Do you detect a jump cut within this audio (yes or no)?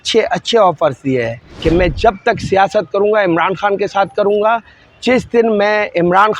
yes